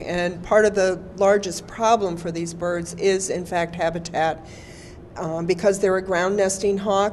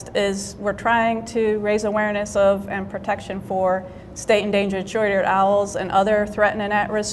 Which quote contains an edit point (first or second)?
second